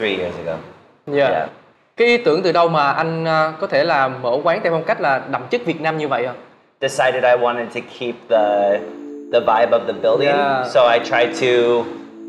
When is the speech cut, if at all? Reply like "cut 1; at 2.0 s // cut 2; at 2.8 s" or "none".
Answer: none